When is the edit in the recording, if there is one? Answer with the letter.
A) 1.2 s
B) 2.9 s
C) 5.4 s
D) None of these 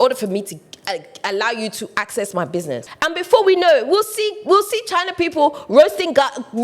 B